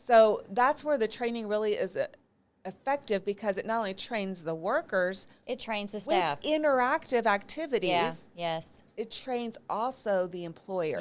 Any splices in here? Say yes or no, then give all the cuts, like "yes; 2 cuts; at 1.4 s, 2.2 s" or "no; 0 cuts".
no; 0 cuts